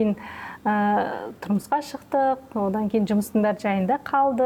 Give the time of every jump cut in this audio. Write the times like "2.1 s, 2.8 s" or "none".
none